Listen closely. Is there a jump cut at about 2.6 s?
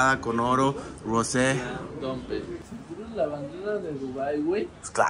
yes; 1 cut; at 2.6 s

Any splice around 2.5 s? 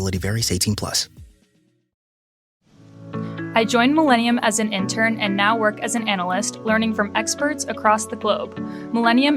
yes; 1 cut; at 2.5 s

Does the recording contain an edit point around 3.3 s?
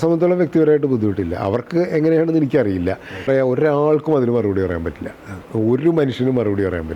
yes; 1 cut; at 3.3 s

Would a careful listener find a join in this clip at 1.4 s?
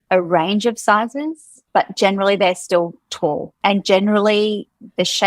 no; 1 cut; at 3.5 s

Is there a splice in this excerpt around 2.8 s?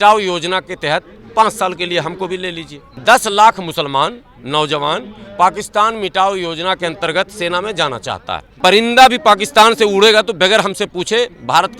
yes; 2 cuts; at 2.8 s, 8.5 s

